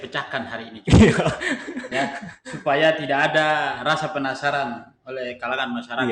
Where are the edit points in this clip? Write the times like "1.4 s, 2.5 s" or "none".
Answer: none